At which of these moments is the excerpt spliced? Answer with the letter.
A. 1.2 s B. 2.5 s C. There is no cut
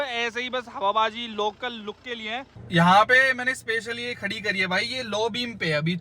B